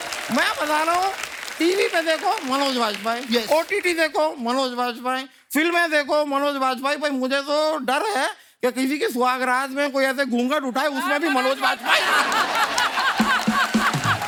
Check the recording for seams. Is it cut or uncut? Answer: uncut